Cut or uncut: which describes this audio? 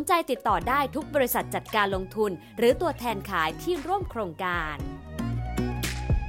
cut